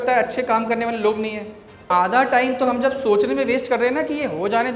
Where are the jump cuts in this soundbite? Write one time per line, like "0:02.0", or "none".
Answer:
0:01.9